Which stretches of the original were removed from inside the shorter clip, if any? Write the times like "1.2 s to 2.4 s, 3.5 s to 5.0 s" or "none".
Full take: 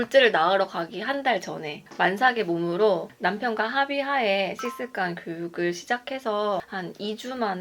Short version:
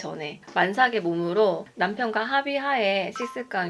none

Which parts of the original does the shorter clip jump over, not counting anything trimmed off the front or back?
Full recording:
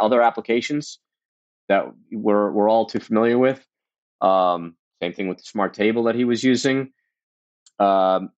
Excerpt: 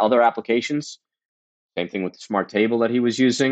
1.5 s to 4.7 s

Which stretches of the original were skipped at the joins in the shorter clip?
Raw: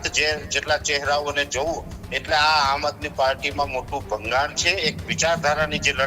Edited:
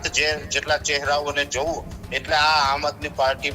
none

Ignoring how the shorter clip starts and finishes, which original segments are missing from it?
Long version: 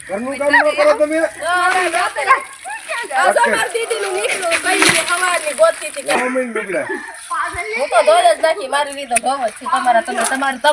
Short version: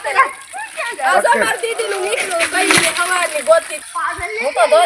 5.9 s to 7.1 s

